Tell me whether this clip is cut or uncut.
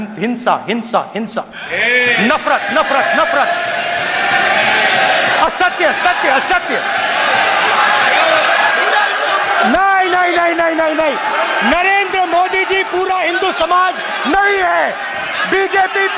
cut